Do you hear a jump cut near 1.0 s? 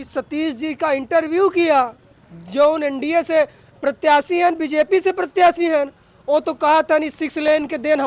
no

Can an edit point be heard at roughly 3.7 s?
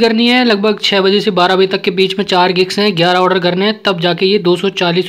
no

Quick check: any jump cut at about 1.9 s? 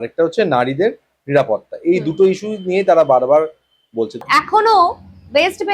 no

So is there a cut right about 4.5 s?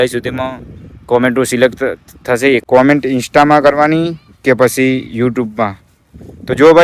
no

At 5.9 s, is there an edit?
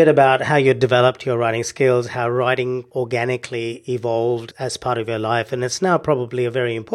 no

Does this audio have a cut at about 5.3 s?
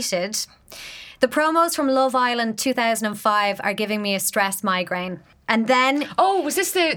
yes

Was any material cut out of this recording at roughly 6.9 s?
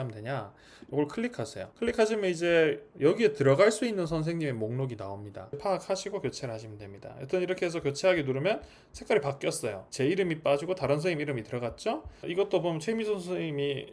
no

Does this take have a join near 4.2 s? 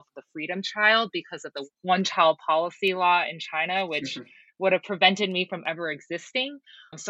no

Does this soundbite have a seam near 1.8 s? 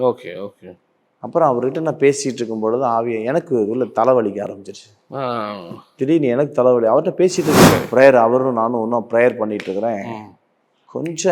no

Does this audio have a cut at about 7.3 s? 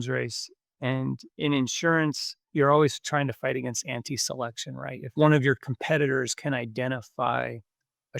no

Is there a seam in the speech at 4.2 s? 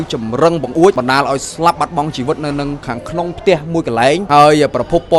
yes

